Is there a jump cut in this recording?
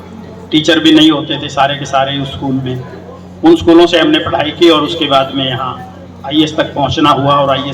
no; 0 cuts

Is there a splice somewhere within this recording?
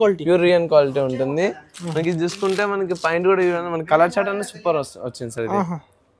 no; 0 cuts

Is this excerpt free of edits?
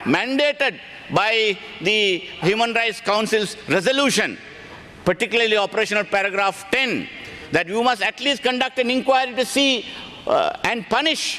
yes; 0 cuts

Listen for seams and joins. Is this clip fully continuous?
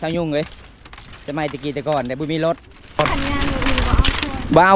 no; 1 cut; at 3.0 s

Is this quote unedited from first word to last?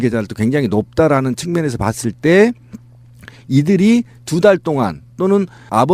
yes; 0 cuts

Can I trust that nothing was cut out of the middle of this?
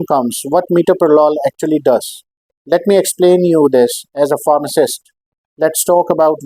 yes; 0 cuts

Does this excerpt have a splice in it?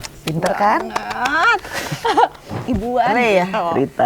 yes; 1 cut; at 2.7 s

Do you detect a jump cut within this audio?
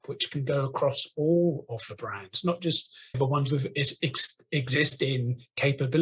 no; 0 cuts

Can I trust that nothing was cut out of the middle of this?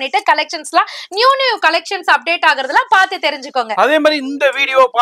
yes; 0 cuts

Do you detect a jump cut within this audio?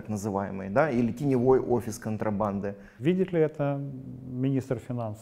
yes; 1 cut; at 2.8 s

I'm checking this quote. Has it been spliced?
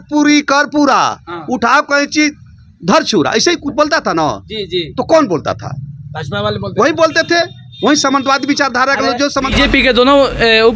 yes; 1 cut; at 9.5 s

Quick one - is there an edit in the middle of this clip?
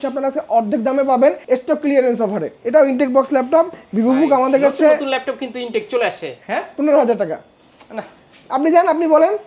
yes; 3 cuts; at 1.4 s, 2.5 s, 6.4 s

